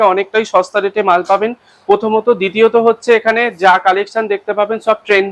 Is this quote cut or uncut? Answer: uncut